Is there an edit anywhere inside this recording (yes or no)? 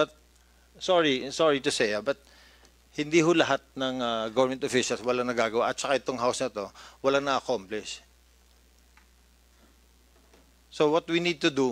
yes